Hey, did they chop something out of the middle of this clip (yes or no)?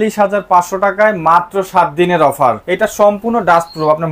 yes